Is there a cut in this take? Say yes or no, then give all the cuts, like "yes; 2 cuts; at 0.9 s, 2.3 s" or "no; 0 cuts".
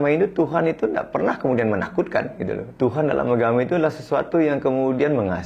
yes; 1 cut; at 2.7 s